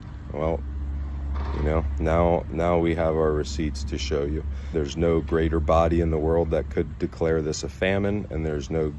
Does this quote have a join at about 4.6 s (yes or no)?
yes